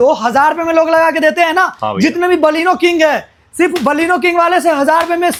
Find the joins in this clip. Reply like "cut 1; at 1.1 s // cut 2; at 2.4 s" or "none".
none